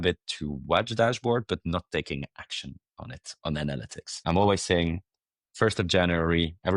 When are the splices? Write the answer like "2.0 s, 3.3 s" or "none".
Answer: 4.2 s